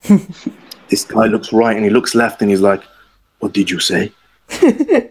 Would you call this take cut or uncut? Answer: uncut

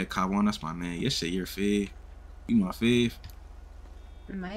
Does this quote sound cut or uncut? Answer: uncut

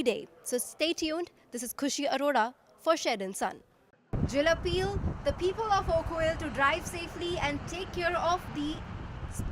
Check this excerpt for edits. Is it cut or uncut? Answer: cut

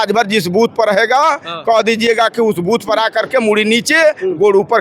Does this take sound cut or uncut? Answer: uncut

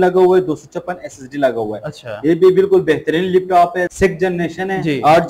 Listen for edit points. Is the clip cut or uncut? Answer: cut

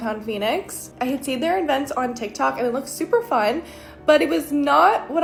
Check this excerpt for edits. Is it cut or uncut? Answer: uncut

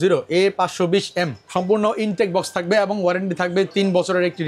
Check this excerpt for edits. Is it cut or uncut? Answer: uncut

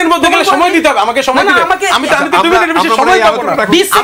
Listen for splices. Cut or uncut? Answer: uncut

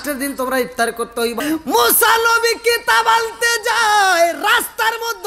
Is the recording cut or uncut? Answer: cut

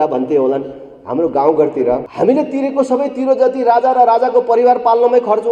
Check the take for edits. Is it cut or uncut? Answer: cut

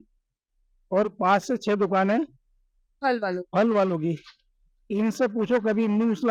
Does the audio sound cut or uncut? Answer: uncut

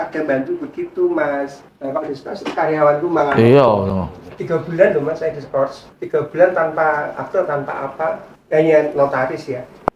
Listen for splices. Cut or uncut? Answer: uncut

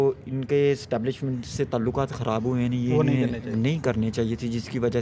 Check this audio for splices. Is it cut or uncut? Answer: uncut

